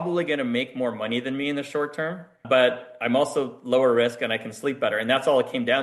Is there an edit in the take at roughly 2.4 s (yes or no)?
yes